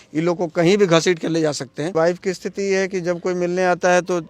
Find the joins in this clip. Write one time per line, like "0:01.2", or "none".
0:01.9